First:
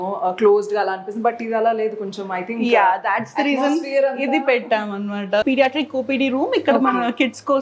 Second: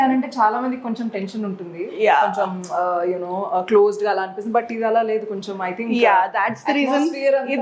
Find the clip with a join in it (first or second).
first